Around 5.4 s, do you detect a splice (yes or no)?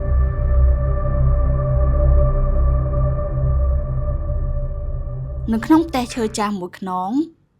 yes